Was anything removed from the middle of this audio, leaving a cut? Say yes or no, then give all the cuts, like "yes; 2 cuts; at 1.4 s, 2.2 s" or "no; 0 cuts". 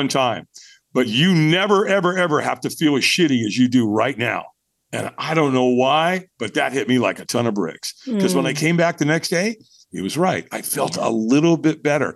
no; 0 cuts